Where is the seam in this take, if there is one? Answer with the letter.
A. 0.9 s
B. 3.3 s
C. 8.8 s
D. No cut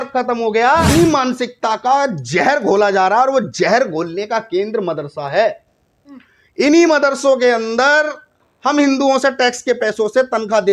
A